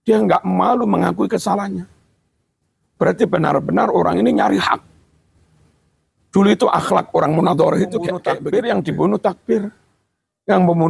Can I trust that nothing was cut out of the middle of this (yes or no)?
no